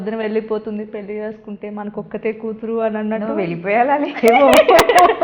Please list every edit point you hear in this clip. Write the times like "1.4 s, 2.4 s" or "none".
none